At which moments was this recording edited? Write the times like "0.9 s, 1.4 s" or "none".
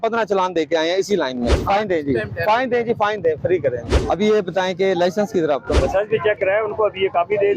1.6 s, 4.0 s, 5.7 s

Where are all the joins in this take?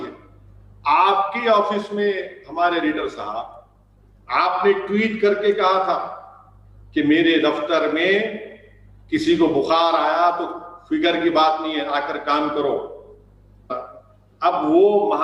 13.7 s

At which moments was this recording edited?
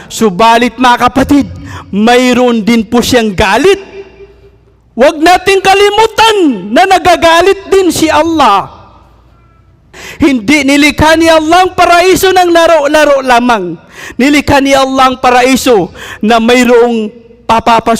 10.0 s

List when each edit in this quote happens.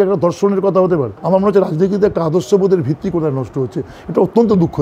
1.1 s

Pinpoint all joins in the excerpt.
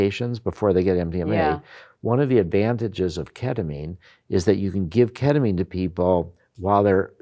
none

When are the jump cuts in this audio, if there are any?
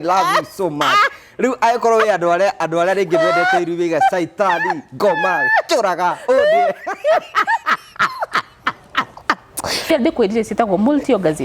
9.9 s

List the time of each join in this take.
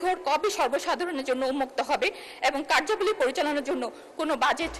none

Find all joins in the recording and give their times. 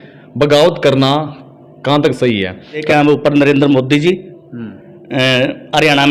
2.8 s

